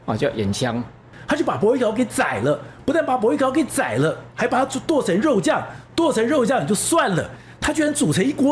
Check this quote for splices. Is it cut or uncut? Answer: cut